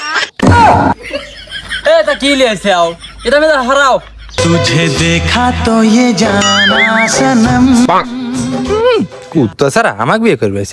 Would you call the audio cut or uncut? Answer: uncut